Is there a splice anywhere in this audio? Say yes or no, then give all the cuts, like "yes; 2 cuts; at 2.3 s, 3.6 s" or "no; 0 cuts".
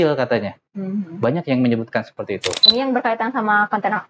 yes; 1 cut; at 2.7 s